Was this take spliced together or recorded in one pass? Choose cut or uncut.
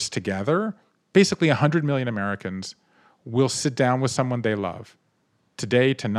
cut